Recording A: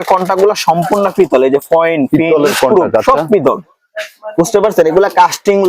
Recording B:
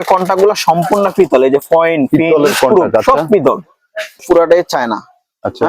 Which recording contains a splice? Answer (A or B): B